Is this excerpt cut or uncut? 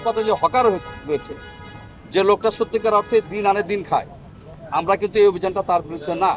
uncut